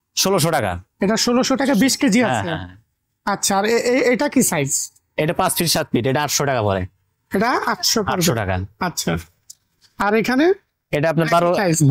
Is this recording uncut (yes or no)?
yes